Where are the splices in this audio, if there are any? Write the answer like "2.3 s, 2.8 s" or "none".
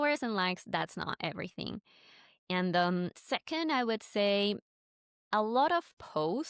none

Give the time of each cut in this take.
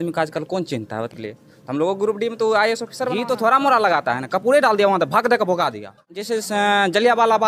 1.1 s, 3.1 s, 6.3 s

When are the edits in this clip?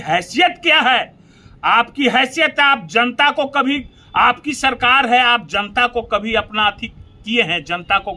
none

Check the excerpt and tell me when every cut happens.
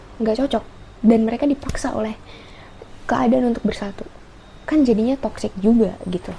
none

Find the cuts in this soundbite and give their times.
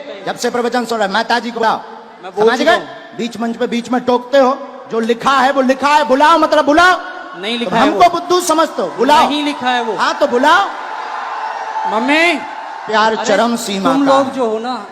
1.6 s, 12.9 s

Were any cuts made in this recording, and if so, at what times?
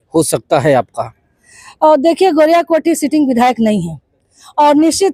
none

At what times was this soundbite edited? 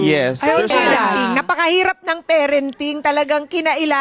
1.2 s

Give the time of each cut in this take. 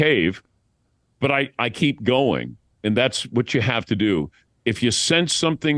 none

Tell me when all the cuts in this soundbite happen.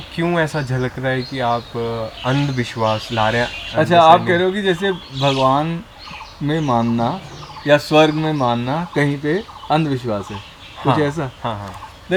none

